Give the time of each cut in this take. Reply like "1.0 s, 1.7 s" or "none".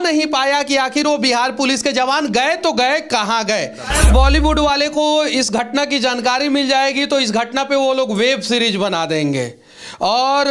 3.9 s